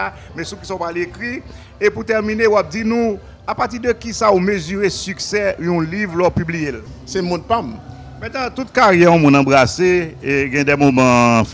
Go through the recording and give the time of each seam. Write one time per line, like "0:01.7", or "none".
0:06.9